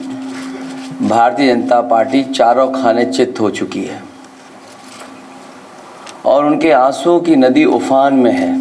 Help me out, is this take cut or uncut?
uncut